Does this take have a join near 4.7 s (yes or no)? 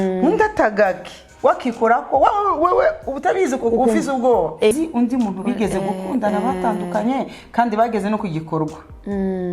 yes